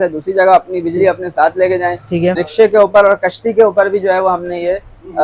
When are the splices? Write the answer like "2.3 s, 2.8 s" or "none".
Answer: 2.4 s